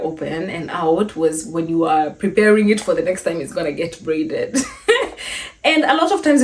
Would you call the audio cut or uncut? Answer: uncut